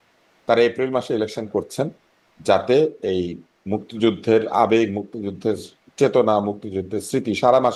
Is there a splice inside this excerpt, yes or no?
no